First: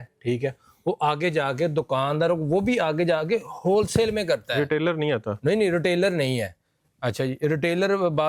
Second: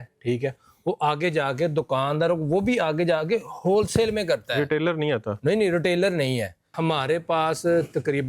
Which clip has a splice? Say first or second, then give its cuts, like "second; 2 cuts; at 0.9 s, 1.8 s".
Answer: second; 1 cut; at 6.7 s